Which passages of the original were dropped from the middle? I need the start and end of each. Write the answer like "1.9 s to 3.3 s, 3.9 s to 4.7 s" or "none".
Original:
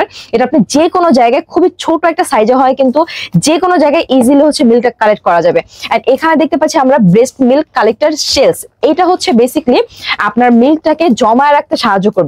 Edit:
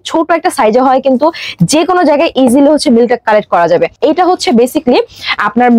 5.7 s to 8.7 s